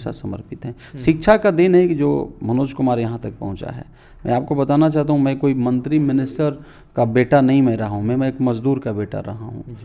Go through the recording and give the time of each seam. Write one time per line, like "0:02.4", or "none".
none